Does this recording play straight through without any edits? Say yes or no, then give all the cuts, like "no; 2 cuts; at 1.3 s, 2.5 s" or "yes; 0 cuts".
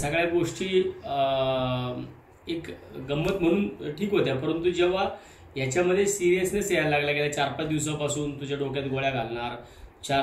yes; 0 cuts